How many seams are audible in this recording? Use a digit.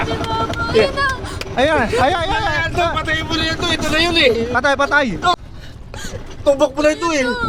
0